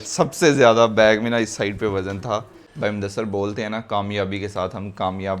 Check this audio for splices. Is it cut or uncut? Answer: cut